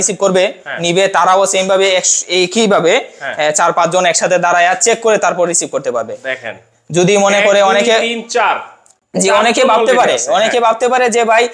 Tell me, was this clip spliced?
no; 0 cuts

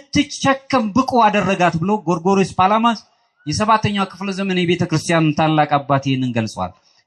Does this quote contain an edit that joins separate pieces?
no; 0 cuts

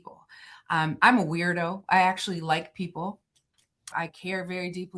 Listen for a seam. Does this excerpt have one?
yes; 1 cut; at 3.8 s

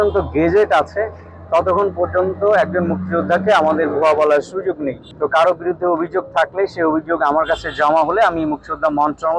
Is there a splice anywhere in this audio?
no; 0 cuts

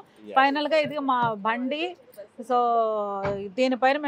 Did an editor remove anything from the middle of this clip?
no; 0 cuts

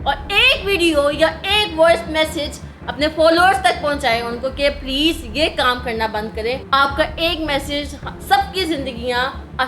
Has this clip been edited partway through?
yes; 1 cut; at 6.6 s

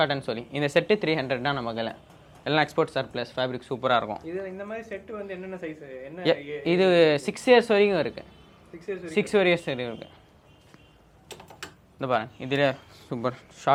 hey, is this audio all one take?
yes; 0 cuts

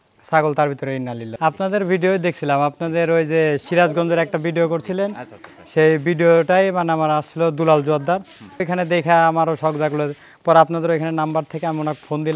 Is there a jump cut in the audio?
yes; 2 cuts; at 1.4 s, 8.6 s

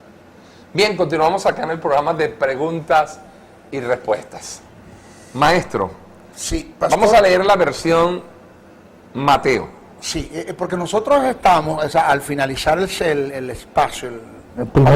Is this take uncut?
no; 1 cut; at 10.6 s

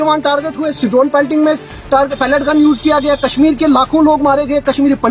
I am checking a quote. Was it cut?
no; 0 cuts

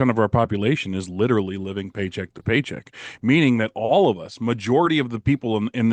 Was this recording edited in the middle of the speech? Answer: no; 0 cuts

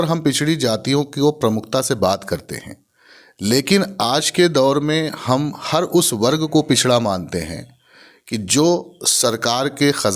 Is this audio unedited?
yes; 0 cuts

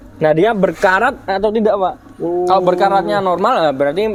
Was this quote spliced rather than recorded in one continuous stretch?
no; 0 cuts

